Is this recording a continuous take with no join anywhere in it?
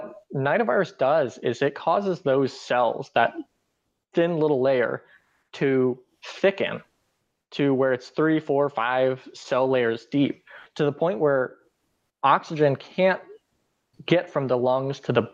yes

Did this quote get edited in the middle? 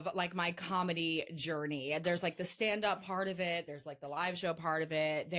no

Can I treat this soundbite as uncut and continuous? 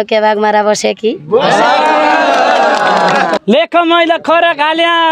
no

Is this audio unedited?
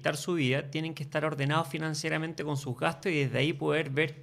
yes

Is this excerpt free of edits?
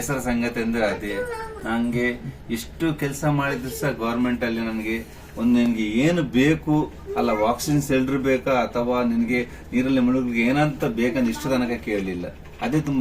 yes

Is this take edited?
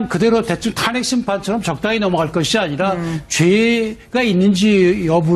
yes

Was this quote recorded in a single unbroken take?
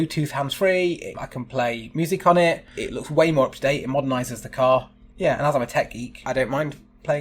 no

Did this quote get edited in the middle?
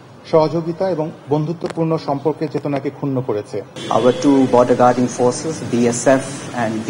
yes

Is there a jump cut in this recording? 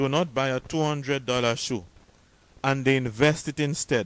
no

